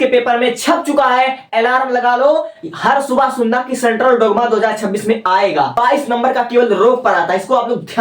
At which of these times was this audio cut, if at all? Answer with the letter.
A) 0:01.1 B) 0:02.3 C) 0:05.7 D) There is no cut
C